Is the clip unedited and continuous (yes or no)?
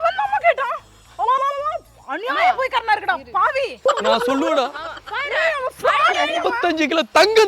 no